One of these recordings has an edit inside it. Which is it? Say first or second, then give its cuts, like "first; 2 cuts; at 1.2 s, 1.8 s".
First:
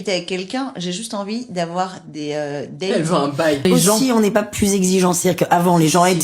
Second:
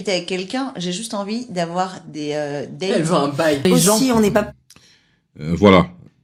first; 1 cut; at 4.5 s